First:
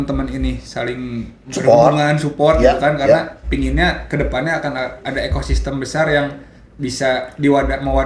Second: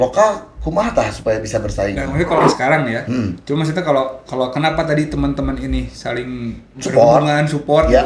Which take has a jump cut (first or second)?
second